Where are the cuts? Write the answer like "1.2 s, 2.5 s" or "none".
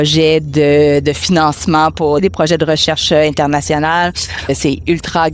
2.2 s, 4.5 s